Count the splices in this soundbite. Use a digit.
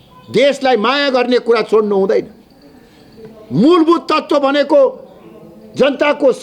0